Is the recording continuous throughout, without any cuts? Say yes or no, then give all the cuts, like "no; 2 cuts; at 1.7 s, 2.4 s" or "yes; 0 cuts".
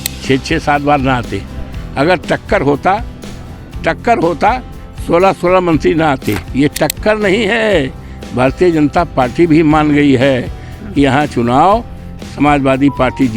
no; 1 cut; at 6.4 s